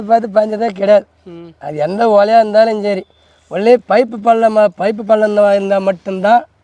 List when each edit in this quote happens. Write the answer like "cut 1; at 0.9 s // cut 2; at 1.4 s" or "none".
none

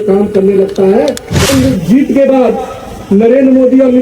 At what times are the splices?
cut 1; at 1.4 s

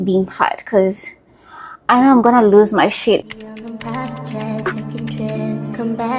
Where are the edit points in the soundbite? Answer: cut 1; at 3.2 s

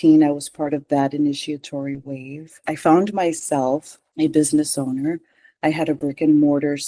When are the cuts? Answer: cut 1; at 2.6 s // cut 2; at 4.0 s

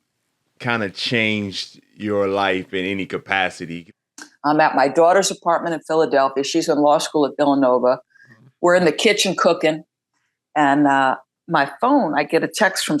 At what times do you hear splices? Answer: cut 1; at 3.7 s

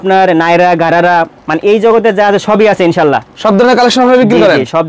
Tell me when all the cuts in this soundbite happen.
none

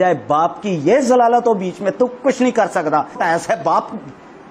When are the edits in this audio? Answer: cut 1; at 3.2 s

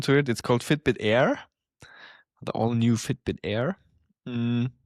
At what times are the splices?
none

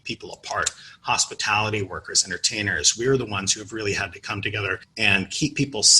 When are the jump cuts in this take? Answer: cut 1; at 4.9 s

